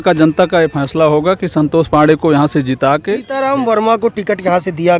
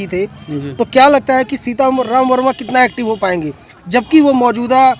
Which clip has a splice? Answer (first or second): first